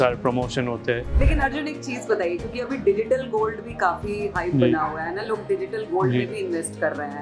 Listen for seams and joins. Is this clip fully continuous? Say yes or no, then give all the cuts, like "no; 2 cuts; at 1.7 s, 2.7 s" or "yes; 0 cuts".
no; 1 cut; at 1.1 s